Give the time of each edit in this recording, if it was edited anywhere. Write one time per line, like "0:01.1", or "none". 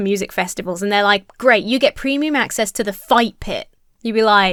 none